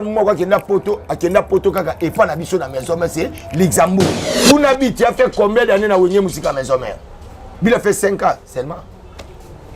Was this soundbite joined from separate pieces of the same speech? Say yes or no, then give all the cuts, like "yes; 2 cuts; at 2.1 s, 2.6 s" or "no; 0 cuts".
yes; 1 cut; at 4.2 s